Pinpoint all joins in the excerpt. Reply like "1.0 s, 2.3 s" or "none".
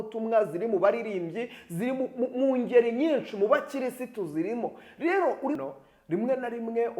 5.6 s